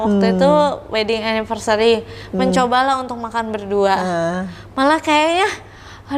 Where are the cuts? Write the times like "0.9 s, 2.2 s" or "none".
none